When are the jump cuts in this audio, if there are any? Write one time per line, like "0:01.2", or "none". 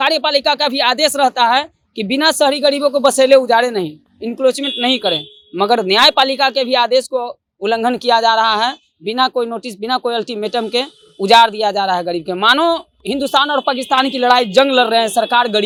none